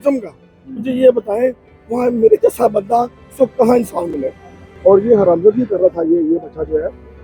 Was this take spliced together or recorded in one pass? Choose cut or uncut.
cut